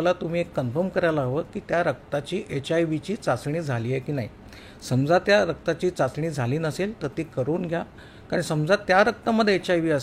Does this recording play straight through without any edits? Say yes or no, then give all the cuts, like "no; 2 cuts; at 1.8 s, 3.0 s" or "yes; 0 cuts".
yes; 0 cuts